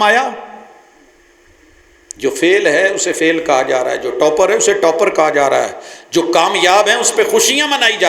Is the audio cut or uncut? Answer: uncut